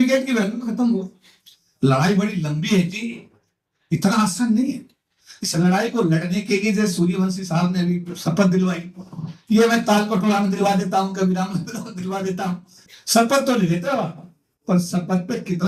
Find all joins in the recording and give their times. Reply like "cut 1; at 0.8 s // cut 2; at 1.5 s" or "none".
none